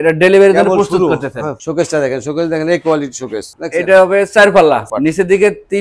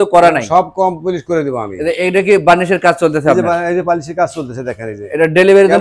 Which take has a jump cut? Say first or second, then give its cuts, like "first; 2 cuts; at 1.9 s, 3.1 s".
first; 3 cuts; at 1.6 s, 3.5 s, 4.9 s